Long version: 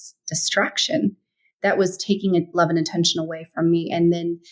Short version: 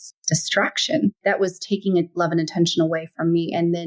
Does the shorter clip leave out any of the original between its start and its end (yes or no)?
yes